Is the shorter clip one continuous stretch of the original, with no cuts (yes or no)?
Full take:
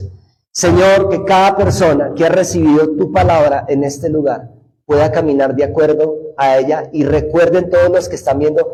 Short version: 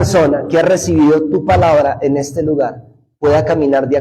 yes